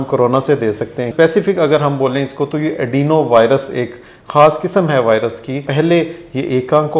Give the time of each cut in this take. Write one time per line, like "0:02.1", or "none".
0:01.1
0:05.7